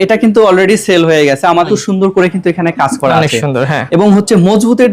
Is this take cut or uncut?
cut